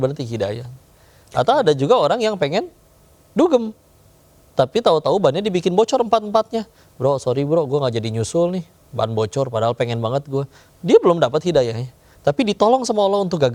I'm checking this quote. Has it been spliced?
no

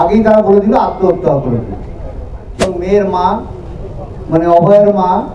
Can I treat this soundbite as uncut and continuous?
no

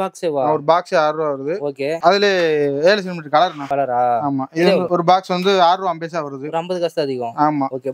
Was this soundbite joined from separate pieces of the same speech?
no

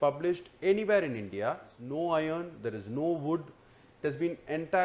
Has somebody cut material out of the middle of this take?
yes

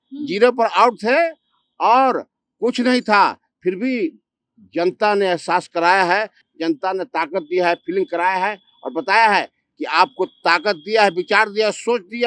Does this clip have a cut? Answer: no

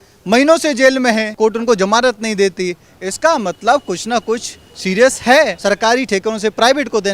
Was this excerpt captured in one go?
no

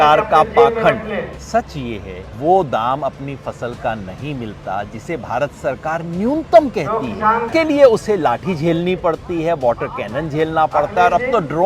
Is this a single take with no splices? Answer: no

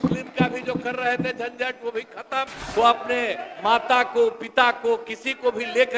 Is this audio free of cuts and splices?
no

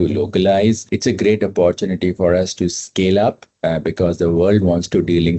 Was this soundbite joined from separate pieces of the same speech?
no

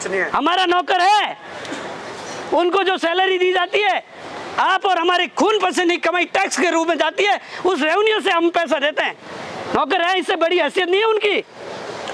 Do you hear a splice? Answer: no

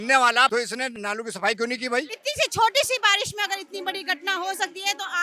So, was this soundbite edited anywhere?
yes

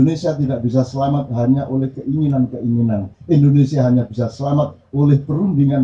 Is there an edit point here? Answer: no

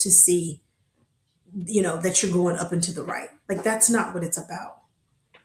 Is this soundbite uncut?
yes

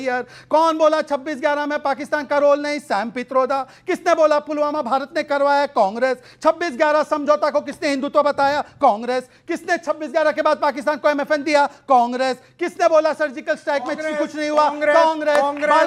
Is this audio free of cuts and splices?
yes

